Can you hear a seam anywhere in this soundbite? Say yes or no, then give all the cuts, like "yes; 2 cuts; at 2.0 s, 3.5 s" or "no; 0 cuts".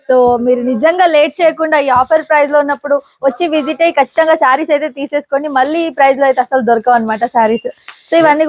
no; 0 cuts